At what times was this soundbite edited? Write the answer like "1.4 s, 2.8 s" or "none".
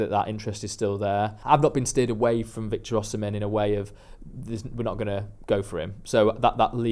1.4 s